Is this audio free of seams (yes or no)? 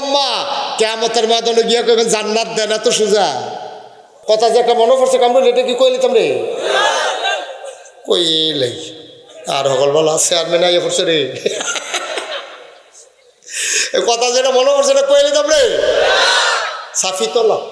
no